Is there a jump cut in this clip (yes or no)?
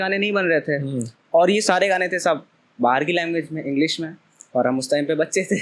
no